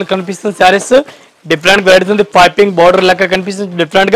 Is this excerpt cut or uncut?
uncut